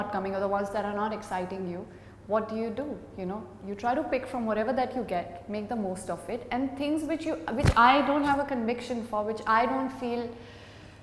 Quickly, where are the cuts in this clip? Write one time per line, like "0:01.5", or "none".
none